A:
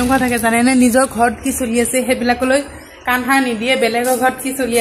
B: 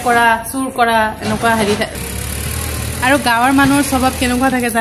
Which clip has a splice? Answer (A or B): B